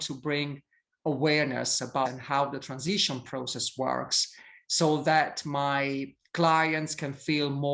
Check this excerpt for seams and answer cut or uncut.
cut